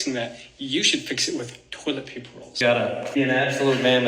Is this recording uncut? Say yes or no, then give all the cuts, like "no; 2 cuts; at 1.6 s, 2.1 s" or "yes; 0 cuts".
no; 1 cut; at 2.5 s